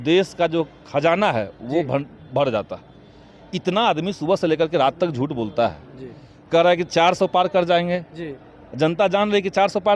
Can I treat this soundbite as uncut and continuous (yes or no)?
yes